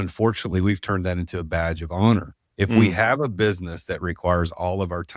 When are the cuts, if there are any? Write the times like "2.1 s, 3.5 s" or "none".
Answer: 2.4 s